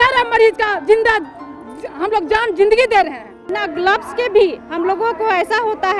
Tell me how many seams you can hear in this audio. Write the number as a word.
one